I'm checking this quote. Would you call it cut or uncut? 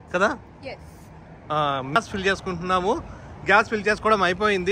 cut